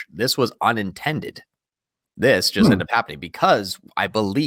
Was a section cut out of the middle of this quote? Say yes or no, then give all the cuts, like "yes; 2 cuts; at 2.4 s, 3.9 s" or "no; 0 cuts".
no; 0 cuts